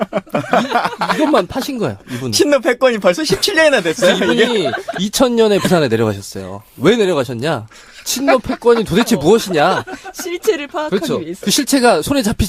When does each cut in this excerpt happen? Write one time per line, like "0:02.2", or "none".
0:09.4